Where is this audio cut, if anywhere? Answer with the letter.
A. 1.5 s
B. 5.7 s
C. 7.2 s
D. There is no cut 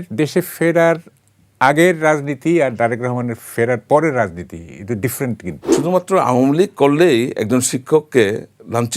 B